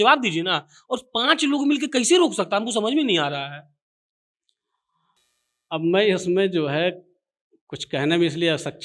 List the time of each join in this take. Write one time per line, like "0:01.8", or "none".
none